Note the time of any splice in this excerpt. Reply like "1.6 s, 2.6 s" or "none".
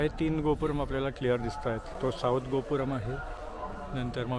none